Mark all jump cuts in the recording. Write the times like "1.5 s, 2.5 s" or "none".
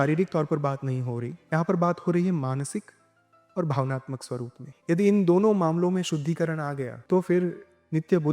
4.7 s, 6.9 s

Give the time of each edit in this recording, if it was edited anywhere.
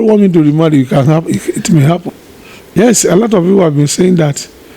2.1 s

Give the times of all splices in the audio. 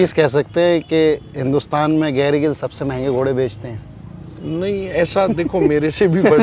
none

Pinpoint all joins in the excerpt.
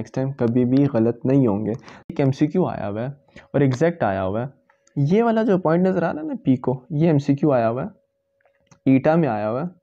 2.1 s

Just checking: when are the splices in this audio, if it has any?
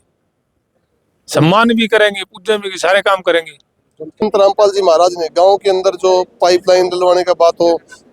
4.2 s

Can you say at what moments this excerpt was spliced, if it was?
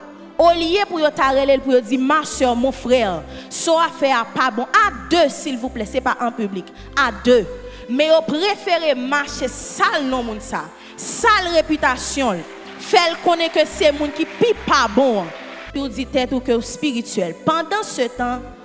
15.7 s

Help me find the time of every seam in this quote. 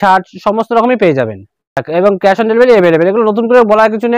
1.8 s

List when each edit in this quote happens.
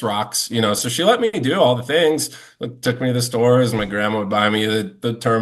none

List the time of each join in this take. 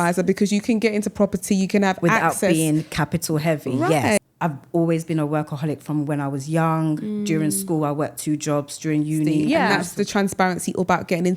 4.2 s, 9.5 s

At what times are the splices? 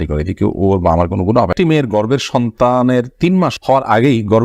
1.5 s

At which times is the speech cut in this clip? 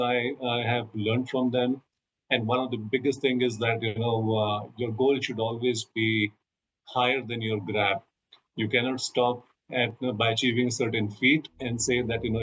none

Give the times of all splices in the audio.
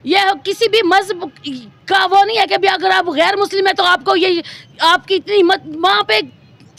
none

